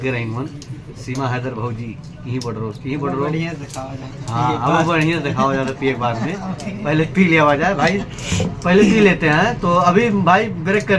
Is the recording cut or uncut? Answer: uncut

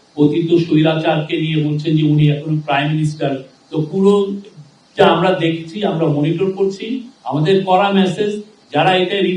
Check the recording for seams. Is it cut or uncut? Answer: uncut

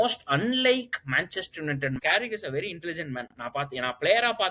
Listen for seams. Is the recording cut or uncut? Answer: cut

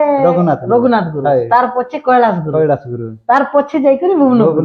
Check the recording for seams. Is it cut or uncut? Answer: uncut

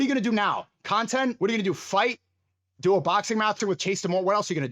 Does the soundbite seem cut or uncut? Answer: cut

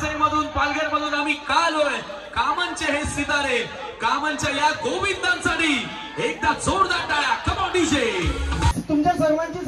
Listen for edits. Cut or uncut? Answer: cut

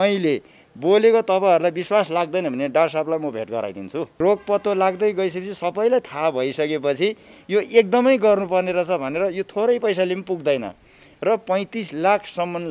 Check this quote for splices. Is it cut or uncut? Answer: cut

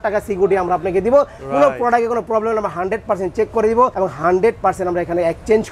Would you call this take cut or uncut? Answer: cut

